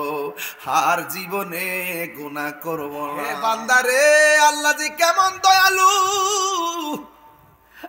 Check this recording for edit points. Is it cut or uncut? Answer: cut